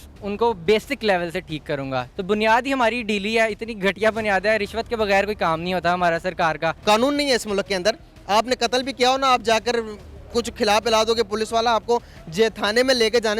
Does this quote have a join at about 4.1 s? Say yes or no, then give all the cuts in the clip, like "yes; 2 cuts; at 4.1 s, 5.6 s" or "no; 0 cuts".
no; 2 cuts; at 2.1 s, 6.8 s